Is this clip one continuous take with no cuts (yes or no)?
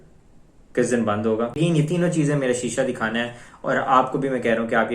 no